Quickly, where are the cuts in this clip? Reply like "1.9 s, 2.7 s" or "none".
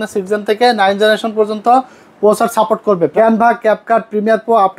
3.1 s